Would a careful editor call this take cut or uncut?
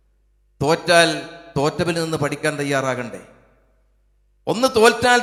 uncut